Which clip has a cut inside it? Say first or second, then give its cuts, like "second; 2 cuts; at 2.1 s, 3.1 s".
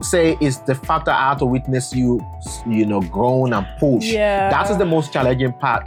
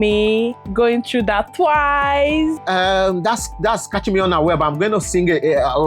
second; 1 cut; at 2.6 s